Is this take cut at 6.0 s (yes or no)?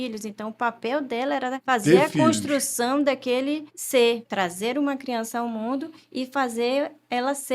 no